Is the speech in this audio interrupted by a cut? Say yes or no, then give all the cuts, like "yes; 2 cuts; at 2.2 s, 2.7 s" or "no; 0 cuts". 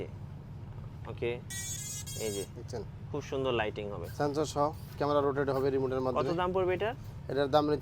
no; 0 cuts